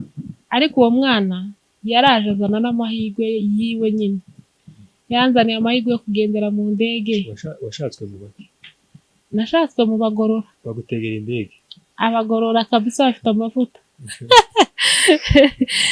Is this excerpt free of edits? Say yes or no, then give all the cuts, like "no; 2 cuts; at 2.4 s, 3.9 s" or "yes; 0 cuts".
yes; 0 cuts